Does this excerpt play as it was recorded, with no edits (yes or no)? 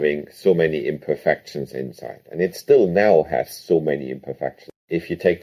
yes